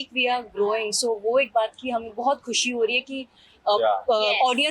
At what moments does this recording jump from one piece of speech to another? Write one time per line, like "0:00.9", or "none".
none